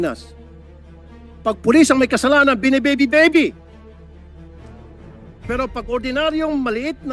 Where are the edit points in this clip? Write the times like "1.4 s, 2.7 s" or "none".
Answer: 3.5 s, 5.5 s